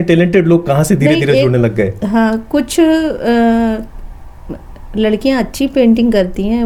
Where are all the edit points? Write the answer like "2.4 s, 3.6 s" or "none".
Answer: none